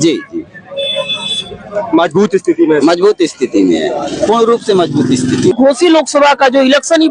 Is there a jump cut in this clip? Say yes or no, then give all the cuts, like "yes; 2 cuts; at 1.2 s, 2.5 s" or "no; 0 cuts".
yes; 1 cut; at 5.5 s